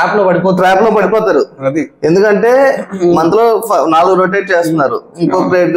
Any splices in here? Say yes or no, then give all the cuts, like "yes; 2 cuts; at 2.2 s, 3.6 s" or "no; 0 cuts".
no; 0 cuts